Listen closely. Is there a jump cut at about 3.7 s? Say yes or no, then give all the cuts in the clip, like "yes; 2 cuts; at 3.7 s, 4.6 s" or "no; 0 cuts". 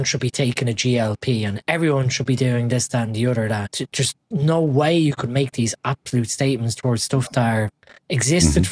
yes; 1 cut; at 3.7 s